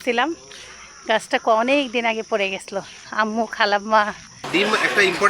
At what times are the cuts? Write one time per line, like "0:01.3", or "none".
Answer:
0:04.3